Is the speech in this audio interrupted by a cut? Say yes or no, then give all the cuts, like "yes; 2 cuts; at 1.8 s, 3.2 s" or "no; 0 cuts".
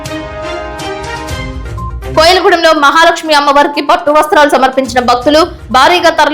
yes; 1 cut; at 1.8 s